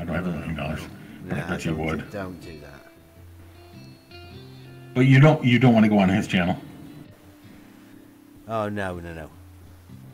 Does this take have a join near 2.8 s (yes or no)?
yes